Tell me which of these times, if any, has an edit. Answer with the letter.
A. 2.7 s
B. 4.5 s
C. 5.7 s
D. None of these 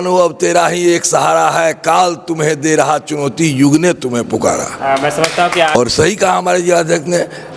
C